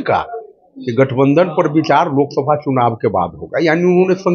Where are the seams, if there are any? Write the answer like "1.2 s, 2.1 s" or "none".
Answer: none